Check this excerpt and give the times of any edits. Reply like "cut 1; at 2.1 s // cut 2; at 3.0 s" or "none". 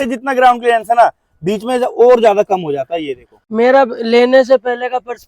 cut 1; at 3.4 s